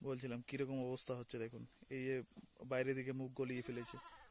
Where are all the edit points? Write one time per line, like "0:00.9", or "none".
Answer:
none